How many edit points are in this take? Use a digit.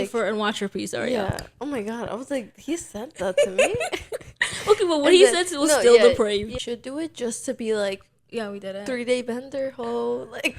1